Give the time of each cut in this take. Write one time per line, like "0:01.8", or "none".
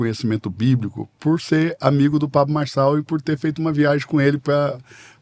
none